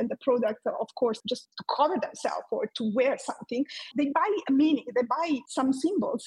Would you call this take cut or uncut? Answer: cut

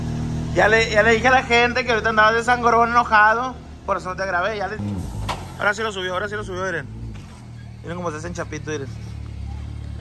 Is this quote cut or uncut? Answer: cut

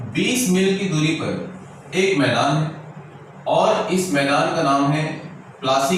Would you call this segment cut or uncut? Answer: uncut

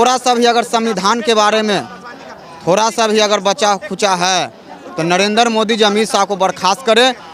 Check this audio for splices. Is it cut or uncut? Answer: uncut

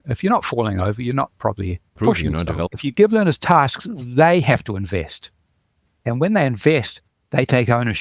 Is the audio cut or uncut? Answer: cut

